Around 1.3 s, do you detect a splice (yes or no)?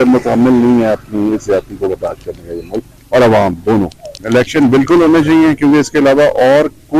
no